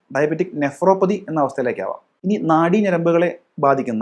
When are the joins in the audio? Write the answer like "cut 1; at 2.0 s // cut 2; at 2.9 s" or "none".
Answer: cut 1; at 2.0 s